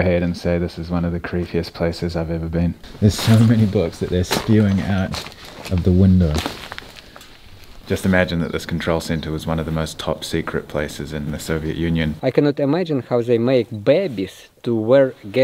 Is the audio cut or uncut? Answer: cut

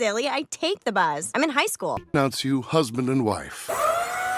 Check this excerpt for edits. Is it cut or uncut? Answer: cut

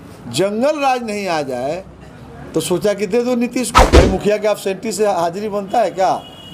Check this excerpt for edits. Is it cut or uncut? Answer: cut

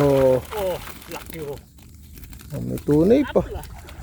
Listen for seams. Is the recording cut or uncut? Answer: uncut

